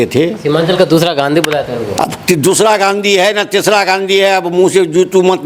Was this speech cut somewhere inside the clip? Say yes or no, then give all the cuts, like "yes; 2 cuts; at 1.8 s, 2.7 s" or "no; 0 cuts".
no; 0 cuts